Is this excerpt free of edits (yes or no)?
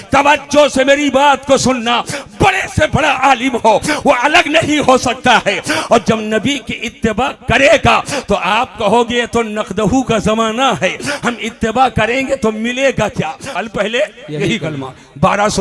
no